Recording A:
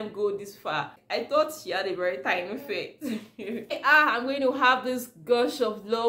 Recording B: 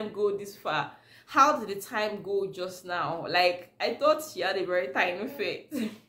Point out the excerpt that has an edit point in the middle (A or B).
A